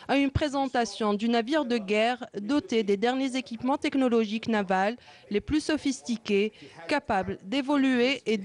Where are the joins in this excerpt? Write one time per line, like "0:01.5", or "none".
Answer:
none